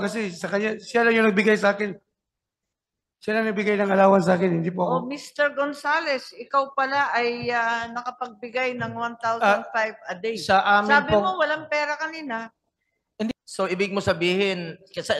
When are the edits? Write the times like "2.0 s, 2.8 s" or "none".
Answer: 13.3 s